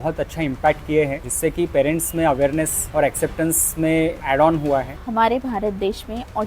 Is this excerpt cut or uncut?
cut